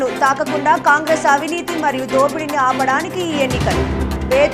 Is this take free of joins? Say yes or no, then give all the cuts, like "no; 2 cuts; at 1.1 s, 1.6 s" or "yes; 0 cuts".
yes; 0 cuts